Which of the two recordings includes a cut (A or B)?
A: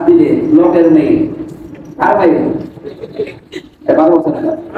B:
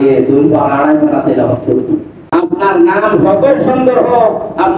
B